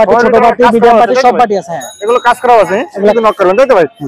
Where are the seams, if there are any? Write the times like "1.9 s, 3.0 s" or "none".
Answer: 3.1 s